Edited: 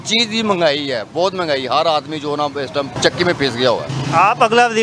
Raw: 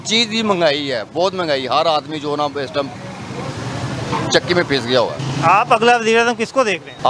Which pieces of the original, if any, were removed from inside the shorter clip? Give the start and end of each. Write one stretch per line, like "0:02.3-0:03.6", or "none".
0:03.0-0:04.3